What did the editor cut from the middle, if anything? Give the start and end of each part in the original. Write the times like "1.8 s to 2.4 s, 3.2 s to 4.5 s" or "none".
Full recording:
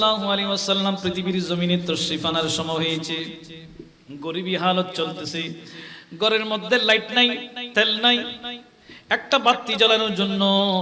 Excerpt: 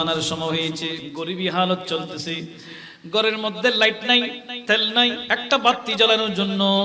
3.3 s to 4.1 s, 8.3 s to 9.0 s